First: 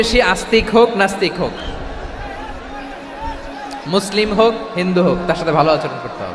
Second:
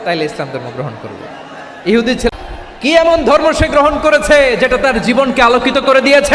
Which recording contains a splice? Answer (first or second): second